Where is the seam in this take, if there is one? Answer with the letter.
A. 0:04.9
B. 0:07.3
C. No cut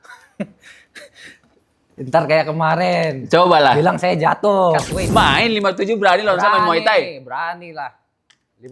A